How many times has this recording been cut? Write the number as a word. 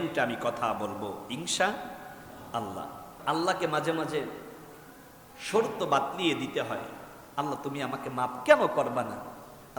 one